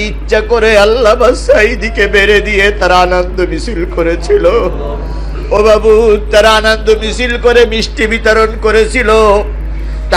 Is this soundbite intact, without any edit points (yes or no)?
yes